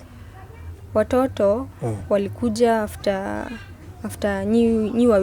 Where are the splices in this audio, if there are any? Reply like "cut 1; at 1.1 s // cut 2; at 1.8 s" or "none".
none